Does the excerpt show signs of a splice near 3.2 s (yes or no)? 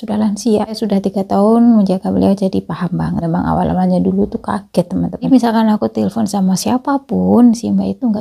yes